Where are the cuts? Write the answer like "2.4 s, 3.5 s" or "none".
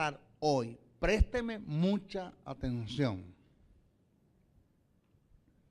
2.1 s